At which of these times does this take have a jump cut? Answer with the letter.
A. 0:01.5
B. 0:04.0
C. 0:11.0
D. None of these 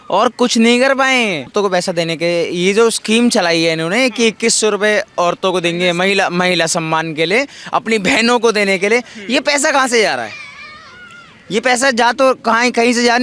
A